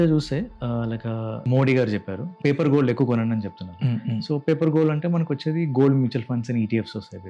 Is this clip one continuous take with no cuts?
no; 2 cuts; at 1.4 s, 2.3 s

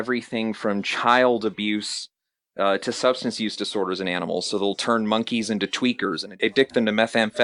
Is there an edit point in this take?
yes; 1 cut; at 6.4 s

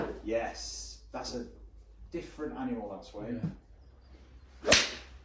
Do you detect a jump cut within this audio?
yes; 1 cut; at 3.7 s

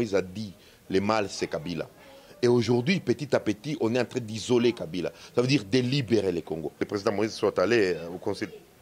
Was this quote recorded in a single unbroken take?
no; 1 cut; at 6.9 s

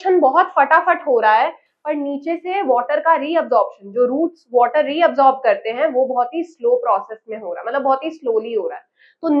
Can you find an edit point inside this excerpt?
no; 0 cuts

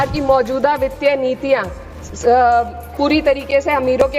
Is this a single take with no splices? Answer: yes; 0 cuts

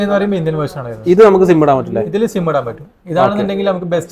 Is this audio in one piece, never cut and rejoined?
yes; 0 cuts

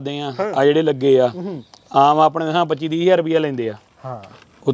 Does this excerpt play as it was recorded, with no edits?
yes; 0 cuts

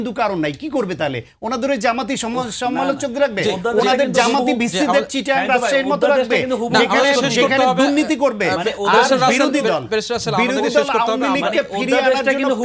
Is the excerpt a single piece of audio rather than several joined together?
yes; 0 cuts

